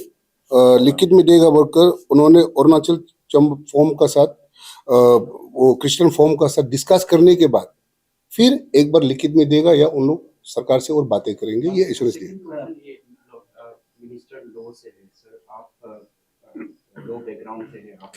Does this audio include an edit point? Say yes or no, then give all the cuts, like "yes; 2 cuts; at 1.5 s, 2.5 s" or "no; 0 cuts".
no; 0 cuts